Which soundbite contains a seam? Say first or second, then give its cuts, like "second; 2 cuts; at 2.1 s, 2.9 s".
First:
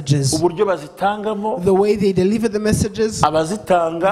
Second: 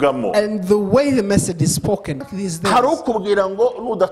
second; 1 cut; at 2.3 s